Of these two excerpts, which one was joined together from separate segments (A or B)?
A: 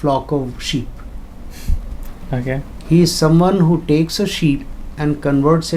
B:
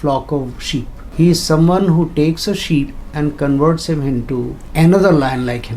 B